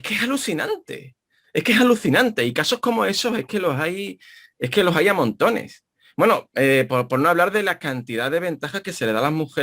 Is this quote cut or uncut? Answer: uncut